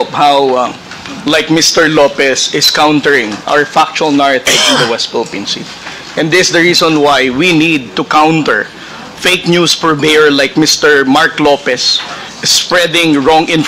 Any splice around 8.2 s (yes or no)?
no